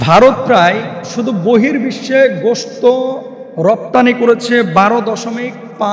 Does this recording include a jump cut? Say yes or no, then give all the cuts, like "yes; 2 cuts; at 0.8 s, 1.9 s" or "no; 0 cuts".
no; 0 cuts